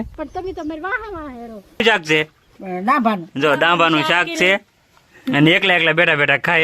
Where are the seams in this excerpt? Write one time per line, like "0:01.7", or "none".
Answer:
0:01.8